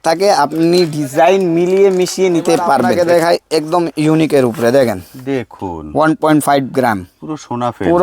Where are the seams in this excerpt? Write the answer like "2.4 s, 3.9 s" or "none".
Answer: 2.9 s